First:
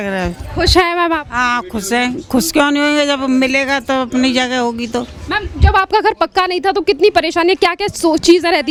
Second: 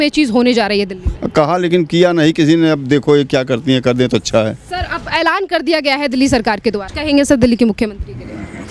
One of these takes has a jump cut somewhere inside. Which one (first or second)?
second